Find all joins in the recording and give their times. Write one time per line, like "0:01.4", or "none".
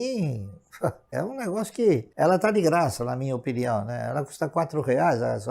0:01.1
0:02.1